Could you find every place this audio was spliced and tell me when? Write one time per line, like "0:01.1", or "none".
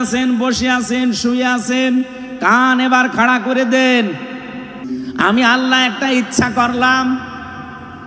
0:04.9